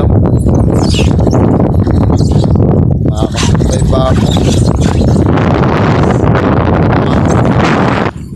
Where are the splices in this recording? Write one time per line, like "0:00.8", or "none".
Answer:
none